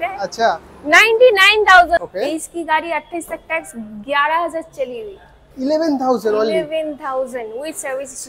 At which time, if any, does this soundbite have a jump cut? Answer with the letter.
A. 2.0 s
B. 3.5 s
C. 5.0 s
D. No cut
A